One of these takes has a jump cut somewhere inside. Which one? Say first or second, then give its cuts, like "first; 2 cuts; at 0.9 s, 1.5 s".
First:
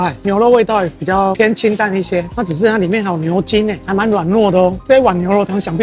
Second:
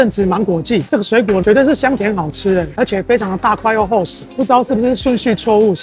second; 1 cut; at 4.2 s